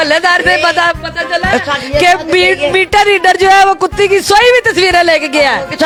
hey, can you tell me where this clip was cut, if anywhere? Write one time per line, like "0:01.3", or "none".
none